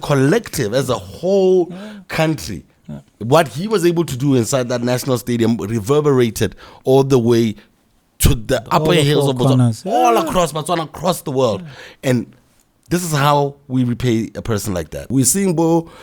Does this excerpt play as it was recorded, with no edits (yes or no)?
no